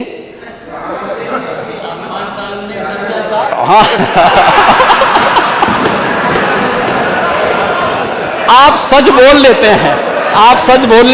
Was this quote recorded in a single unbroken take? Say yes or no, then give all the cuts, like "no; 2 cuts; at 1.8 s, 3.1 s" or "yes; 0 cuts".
no; 1 cut; at 8.2 s